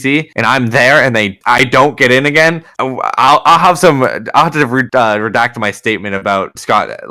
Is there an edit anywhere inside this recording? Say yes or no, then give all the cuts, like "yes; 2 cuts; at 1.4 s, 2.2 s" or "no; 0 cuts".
no; 0 cuts